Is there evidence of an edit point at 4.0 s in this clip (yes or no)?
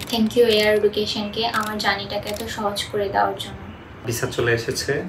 yes